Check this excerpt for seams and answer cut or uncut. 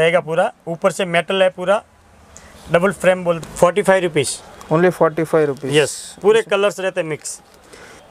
uncut